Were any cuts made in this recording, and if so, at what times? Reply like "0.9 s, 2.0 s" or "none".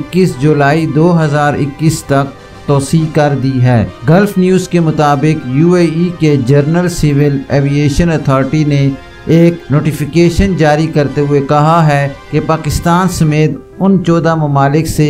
3.9 s, 9.6 s